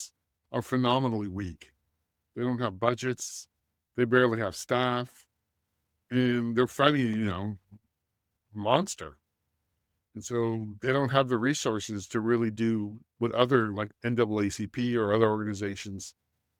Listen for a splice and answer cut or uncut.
uncut